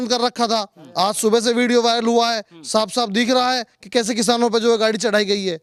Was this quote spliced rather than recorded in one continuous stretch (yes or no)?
no